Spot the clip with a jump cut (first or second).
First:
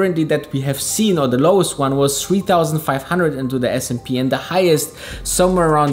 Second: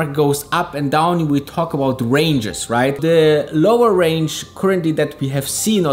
second